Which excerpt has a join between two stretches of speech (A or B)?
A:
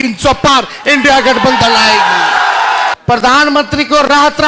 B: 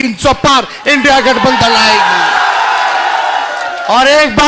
A